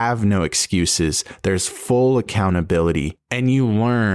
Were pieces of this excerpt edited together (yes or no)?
yes